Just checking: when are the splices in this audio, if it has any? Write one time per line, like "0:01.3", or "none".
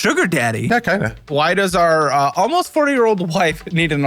0:01.0

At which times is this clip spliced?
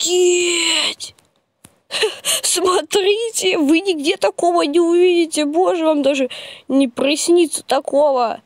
none

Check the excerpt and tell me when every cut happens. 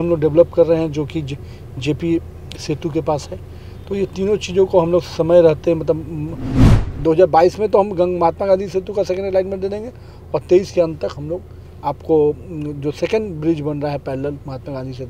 0:06.6

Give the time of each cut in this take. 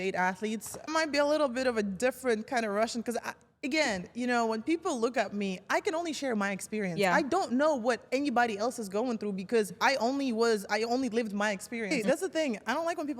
0:00.8
0:11.9

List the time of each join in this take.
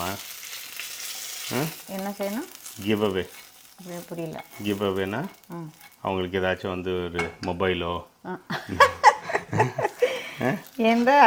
none

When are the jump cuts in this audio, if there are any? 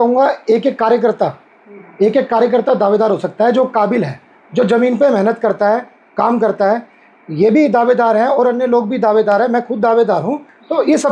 none

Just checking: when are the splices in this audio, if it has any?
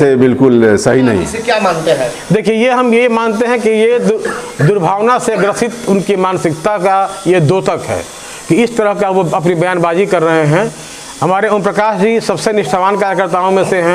0:01.3

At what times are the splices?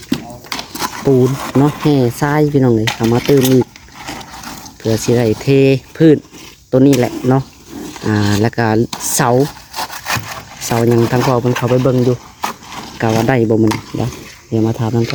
none

